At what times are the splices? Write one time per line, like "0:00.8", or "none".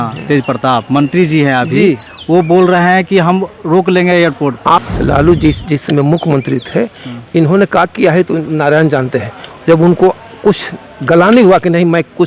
0:04.9